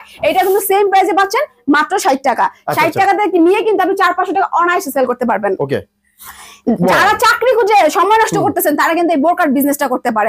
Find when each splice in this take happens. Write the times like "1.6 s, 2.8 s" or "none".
none